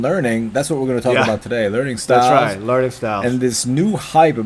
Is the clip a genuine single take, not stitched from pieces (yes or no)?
yes